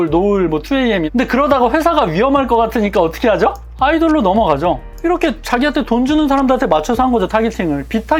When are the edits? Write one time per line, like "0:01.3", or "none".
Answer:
0:01.1
0:04.9